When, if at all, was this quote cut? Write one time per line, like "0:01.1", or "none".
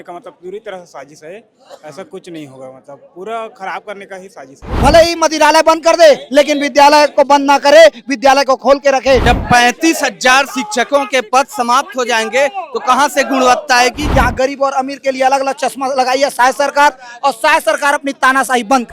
0:04.6
0:09.2
0:14.0